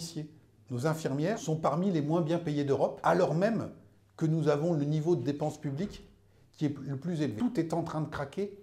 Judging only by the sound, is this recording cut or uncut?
cut